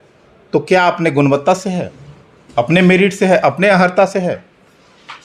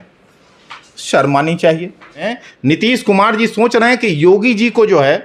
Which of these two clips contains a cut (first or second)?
second